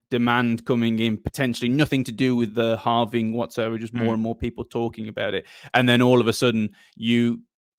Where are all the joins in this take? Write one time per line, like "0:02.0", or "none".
none